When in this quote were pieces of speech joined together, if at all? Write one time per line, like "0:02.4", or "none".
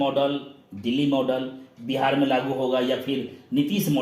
none